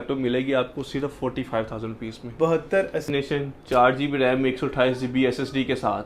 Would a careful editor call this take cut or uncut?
cut